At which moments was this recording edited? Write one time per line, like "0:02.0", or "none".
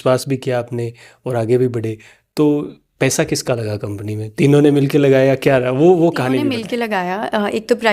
0:06.6